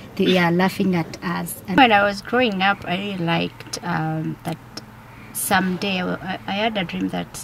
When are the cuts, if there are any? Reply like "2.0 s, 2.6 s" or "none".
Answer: 1.8 s